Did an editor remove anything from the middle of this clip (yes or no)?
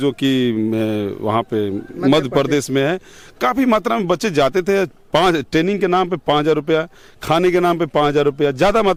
no